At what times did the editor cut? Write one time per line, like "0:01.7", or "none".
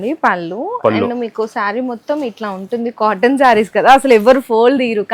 none